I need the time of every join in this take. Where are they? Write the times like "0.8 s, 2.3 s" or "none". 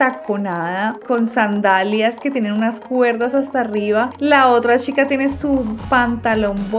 none

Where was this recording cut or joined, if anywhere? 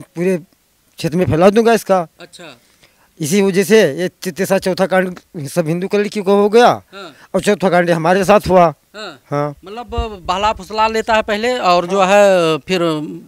none

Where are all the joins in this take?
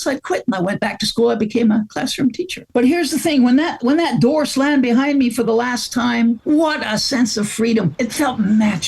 2.5 s, 6.4 s, 7.9 s

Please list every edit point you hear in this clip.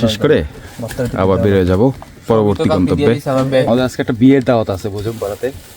3.7 s

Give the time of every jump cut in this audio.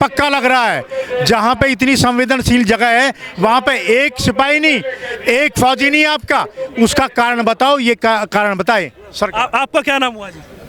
none

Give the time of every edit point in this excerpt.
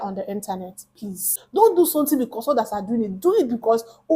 1.2 s

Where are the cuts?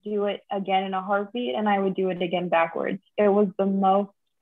none

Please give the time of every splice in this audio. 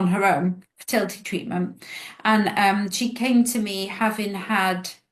none

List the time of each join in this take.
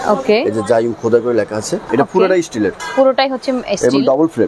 1.8 s

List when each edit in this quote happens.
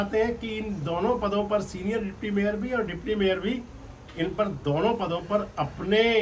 none

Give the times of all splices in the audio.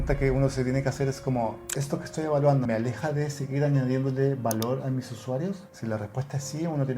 2.7 s, 5.7 s

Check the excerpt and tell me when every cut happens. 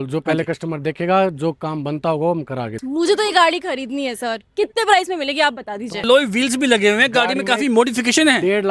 2.7 s, 6.0 s

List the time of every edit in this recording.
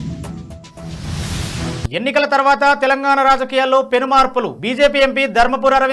1.9 s

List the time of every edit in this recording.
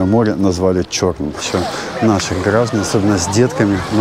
1.5 s

